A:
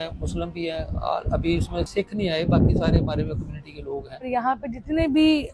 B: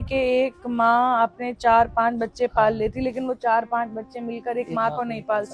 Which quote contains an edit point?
A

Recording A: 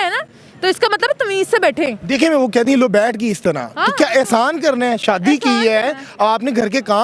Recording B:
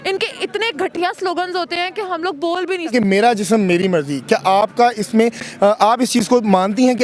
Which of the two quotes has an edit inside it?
B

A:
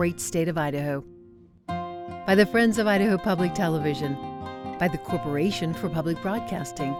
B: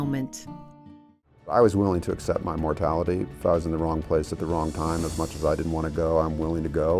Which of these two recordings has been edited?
B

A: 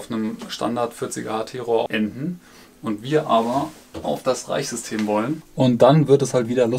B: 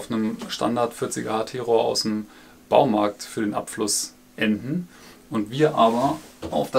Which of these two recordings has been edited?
A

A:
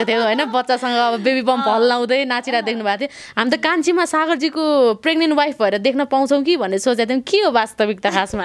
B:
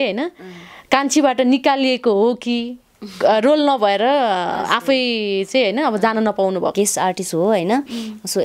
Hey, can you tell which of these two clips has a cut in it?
B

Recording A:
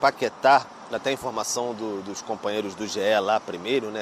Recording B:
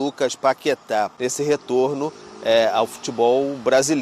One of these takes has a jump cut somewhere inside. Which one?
B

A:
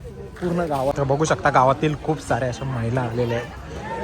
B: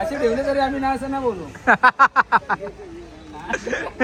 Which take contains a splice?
A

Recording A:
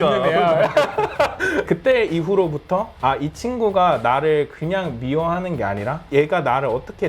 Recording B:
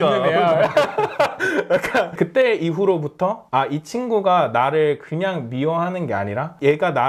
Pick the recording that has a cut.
A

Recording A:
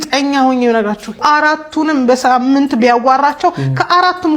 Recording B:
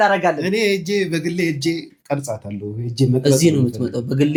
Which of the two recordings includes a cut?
A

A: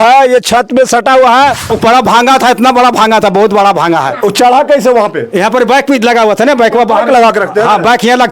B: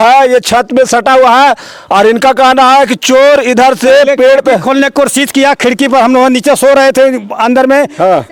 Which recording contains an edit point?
A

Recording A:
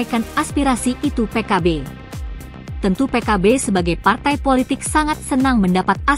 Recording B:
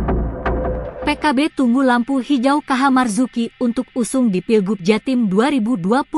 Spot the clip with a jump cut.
B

